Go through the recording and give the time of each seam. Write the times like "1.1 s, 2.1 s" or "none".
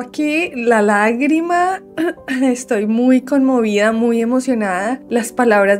none